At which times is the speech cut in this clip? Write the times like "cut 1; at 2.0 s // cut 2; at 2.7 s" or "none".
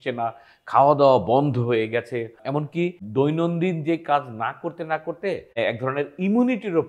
none